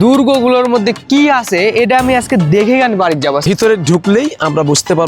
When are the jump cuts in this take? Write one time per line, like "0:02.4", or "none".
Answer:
0:03.4